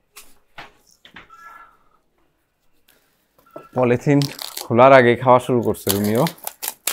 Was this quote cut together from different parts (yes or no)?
yes